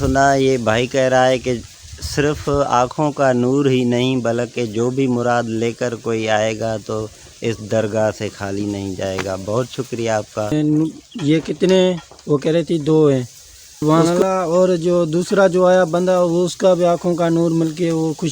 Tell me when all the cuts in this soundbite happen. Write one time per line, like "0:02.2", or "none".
0:10.5
0:13.8